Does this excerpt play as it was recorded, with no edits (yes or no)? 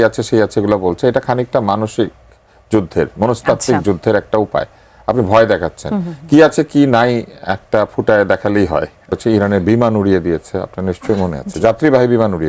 no